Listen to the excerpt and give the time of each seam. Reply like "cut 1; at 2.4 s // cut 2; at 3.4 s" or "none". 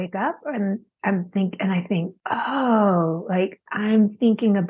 cut 1; at 2.2 s